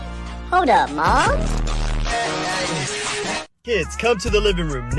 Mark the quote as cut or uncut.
cut